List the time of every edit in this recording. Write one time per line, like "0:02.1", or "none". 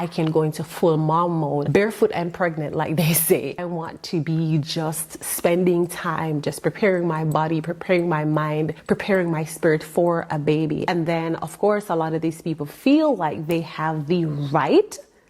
0:01.7
0:03.6
0:08.8
0:10.8